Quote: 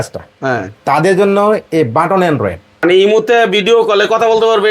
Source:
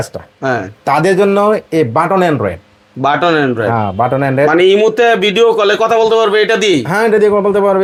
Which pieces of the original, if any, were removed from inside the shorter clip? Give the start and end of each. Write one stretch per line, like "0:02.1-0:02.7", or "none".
0:02.8-0:04.5